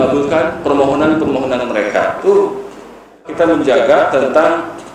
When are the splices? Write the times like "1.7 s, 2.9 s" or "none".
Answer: 3.3 s